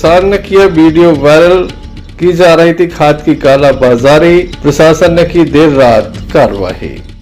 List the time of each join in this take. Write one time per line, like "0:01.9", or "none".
none